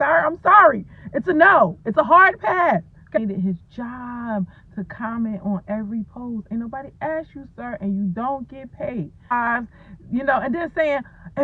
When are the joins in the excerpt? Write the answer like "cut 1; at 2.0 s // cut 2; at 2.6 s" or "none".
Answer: cut 1; at 3.2 s // cut 2; at 9.3 s

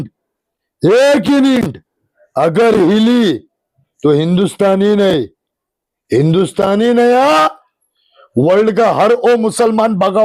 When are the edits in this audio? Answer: none

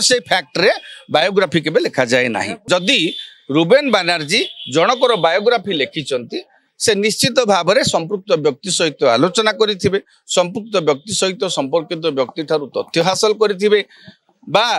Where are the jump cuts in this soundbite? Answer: cut 1; at 2.5 s

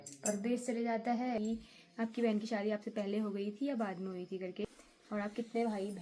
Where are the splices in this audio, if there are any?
cut 1; at 1.4 s // cut 2; at 4.6 s

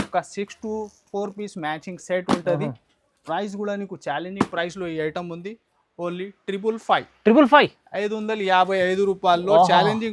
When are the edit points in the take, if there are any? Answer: none

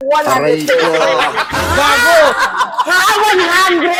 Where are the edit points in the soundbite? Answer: none

